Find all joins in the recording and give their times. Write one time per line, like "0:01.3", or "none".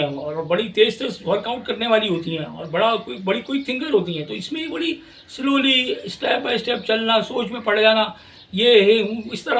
none